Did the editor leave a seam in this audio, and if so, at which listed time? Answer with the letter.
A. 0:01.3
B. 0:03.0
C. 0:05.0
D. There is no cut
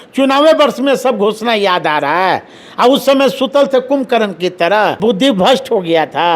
C